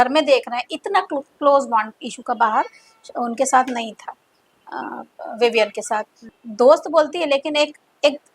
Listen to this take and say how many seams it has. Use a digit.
1